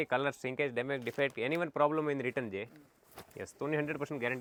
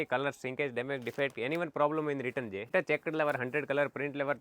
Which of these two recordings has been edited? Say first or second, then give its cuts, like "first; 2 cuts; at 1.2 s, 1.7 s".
second; 1 cut; at 2.7 s